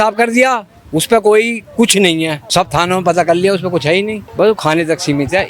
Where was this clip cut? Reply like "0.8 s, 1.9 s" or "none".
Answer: 2.4 s, 4.2 s